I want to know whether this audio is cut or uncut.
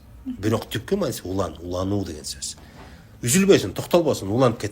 uncut